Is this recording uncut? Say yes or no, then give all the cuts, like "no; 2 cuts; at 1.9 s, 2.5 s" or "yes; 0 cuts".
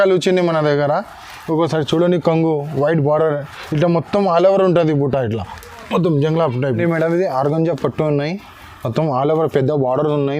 no; 1 cut; at 6.8 s